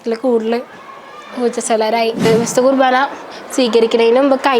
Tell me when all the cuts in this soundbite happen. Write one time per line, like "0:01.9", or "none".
0:02.3